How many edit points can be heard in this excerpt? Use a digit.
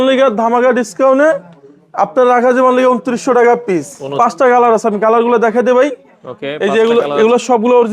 1